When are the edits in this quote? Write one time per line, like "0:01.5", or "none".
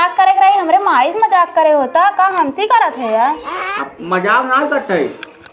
none